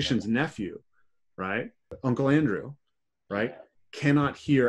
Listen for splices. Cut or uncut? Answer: cut